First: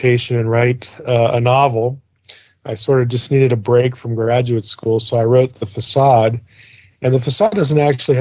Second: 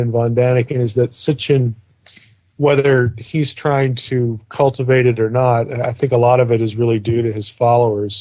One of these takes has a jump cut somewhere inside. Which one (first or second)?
second